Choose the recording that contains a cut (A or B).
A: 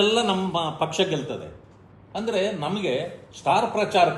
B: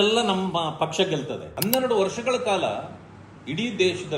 B